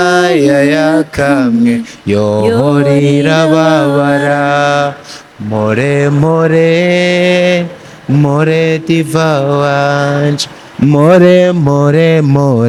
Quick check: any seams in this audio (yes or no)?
no